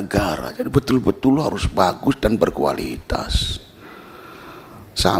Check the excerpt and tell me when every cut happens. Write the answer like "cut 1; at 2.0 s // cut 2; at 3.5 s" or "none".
none